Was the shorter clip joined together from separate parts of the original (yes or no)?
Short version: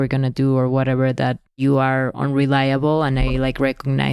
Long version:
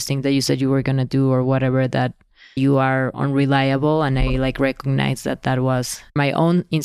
yes